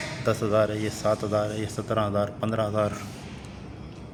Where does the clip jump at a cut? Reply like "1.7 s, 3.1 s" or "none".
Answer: none